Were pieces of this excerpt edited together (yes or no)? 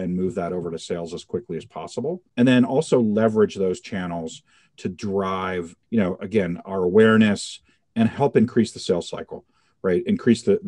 no